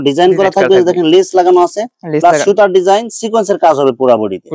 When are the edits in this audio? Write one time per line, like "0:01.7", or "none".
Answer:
none